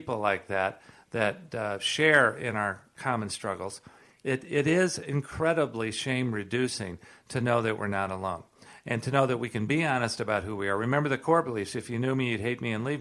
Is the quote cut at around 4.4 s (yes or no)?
no